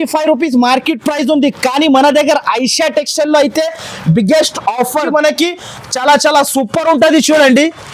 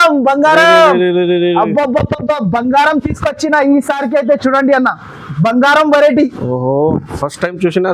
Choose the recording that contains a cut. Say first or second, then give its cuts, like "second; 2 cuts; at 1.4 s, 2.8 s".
first; 1 cut; at 5.1 s